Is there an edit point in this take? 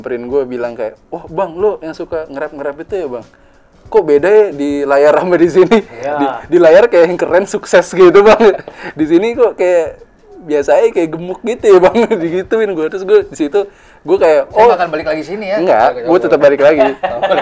no; 0 cuts

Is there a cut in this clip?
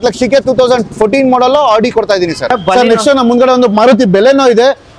no; 0 cuts

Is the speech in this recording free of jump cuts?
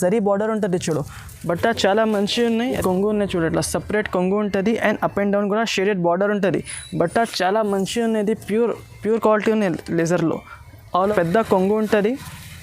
no; 2 cuts; at 2.7 s, 11.0 s

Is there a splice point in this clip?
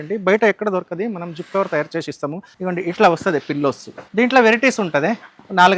yes; 1 cut; at 2.5 s

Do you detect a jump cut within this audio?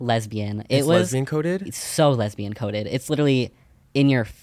no; 0 cuts

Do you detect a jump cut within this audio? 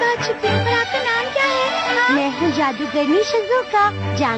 yes; 1 cut; at 2.3 s

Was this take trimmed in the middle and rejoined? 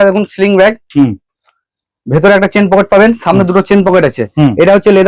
no; 0 cuts

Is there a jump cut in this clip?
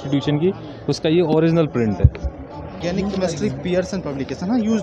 yes; 1 cut; at 2.8 s

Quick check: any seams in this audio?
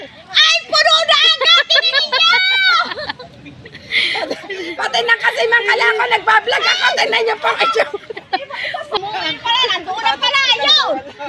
yes; 1 cut; at 9.0 s

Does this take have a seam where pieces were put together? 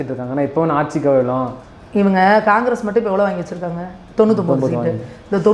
yes; 1 cut; at 1.6 s

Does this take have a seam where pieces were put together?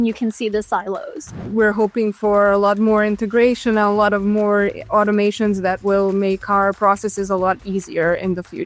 yes; 1 cut; at 1.4 s

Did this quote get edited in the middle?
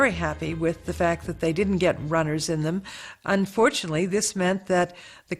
no; 0 cuts

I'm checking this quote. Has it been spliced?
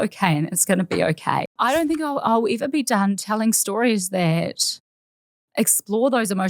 yes; 1 cut; at 1.5 s

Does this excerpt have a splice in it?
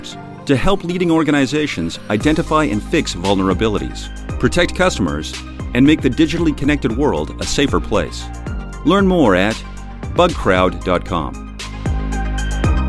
yes; 1 cut; at 11.6 s

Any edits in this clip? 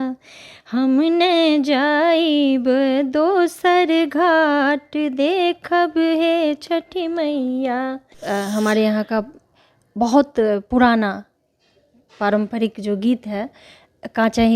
yes; 1 cut; at 8.2 s

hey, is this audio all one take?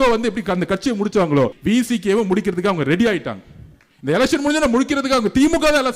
no; 1 cut; at 1.6 s

